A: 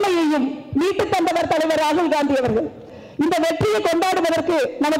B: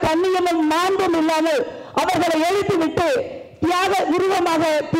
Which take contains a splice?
A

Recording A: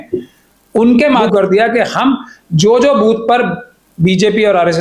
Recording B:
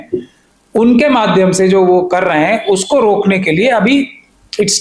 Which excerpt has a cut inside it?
A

